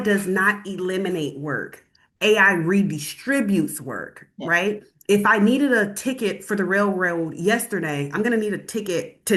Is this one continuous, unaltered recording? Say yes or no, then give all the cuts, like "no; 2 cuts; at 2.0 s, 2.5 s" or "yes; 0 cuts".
yes; 0 cuts